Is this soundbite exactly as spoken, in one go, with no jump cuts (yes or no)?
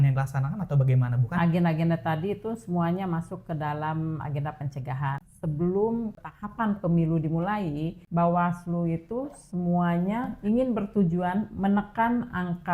no